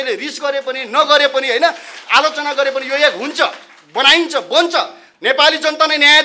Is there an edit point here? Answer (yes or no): yes